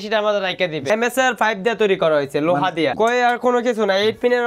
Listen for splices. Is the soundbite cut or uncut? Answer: cut